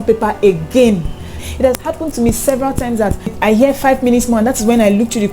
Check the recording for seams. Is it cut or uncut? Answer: cut